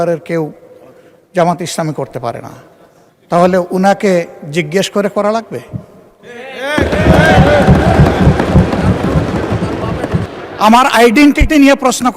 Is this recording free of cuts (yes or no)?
no